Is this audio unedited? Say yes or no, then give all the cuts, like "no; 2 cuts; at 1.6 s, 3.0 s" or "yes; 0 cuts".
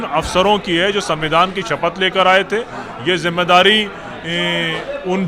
yes; 0 cuts